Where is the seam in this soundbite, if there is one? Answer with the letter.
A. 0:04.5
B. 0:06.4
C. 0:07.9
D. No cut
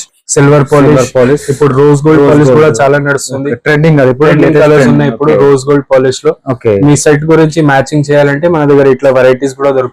D